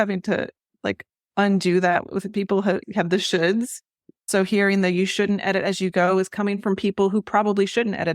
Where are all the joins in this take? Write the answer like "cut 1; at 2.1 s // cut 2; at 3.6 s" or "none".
cut 1; at 2.8 s